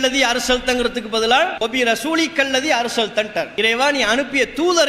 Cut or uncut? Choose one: cut